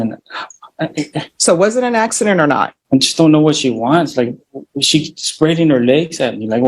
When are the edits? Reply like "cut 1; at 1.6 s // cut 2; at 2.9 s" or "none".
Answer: cut 1; at 2.8 s